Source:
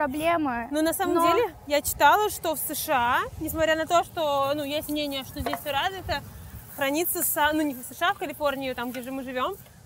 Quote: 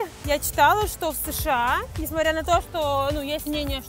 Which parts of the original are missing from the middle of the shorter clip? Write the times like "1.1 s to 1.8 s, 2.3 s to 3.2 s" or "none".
none